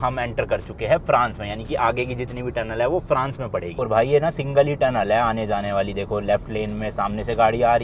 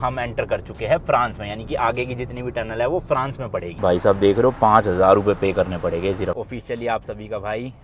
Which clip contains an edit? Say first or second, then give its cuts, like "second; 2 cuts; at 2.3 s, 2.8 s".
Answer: second; 2 cuts; at 3.8 s, 6.3 s